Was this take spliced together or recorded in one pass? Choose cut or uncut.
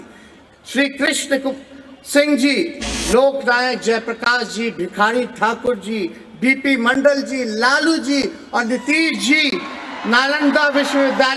uncut